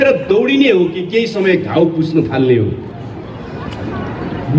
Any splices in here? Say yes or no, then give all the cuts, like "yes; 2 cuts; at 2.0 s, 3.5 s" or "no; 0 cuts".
no; 0 cuts